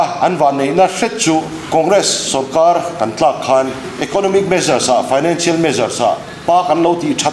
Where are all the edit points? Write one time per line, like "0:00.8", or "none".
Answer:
0:01.6
0:03.9
0:06.3